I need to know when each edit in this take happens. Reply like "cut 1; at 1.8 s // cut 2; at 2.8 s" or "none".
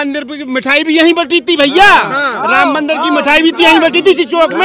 none